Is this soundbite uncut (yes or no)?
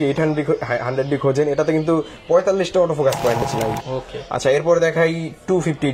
no